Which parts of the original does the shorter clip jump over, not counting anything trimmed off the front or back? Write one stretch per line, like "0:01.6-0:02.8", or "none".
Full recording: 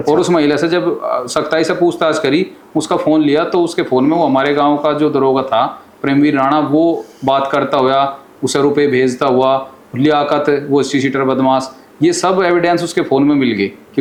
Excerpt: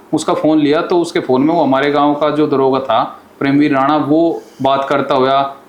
none